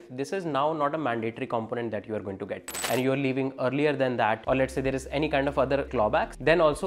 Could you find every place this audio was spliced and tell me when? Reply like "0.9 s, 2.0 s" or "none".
2.8 s